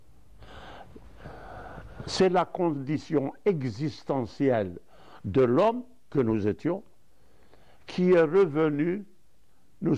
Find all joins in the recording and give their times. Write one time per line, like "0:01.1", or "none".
none

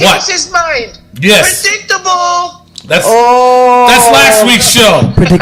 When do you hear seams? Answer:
none

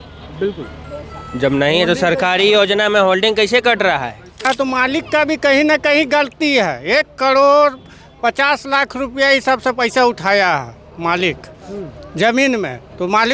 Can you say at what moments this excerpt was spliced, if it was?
0:04.5

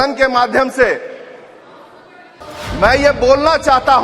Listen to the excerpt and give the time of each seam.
0:02.4

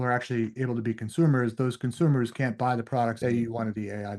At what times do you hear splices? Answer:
0:03.2

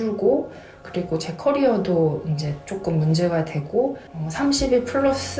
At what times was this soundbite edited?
0:04.1

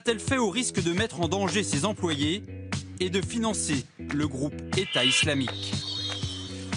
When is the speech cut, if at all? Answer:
0:03.7

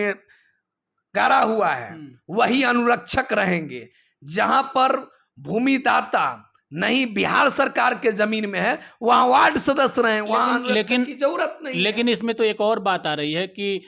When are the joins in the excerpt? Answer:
none

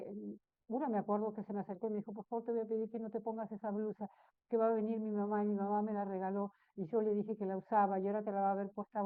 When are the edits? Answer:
none

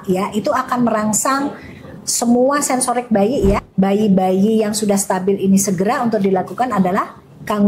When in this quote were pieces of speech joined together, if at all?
0:03.6

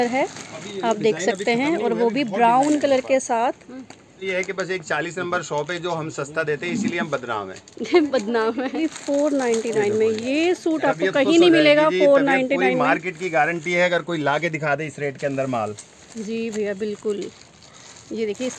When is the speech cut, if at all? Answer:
0:04.2
0:08.9

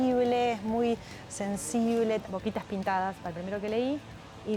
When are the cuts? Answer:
0:02.2

